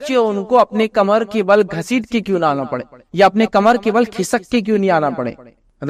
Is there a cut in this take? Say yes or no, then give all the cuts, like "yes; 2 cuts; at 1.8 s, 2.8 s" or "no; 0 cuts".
no; 0 cuts